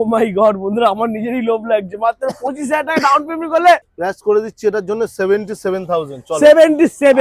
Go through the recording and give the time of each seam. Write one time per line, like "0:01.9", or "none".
0:03.9